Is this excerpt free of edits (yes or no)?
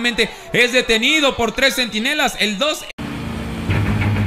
yes